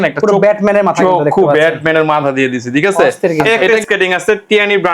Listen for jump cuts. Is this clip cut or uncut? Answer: cut